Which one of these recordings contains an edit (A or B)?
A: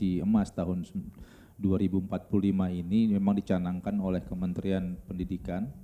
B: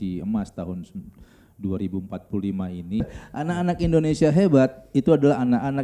B